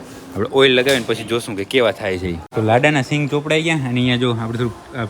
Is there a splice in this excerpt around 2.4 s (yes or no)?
yes